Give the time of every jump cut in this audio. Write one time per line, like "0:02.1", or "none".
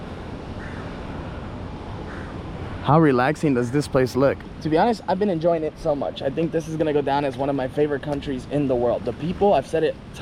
0:04.5